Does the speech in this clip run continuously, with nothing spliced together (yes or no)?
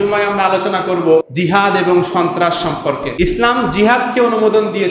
no